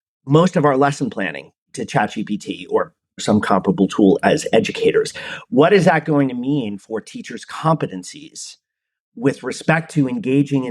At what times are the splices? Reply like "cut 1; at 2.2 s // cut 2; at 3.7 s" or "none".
cut 1; at 3.2 s